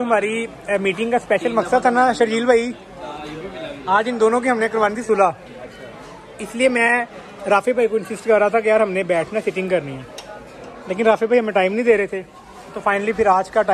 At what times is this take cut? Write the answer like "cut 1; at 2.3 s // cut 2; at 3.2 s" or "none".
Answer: none